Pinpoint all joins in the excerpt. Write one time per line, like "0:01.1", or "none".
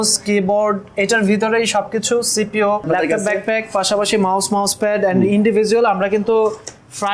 0:02.9